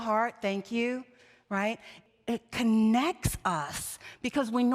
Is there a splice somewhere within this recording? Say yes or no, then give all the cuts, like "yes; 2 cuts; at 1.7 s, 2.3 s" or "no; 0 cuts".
yes; 1 cut; at 2.0 s